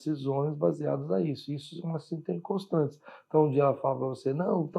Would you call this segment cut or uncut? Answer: uncut